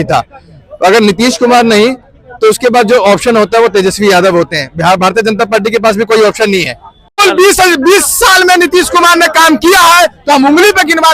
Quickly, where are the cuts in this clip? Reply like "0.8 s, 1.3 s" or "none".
7.2 s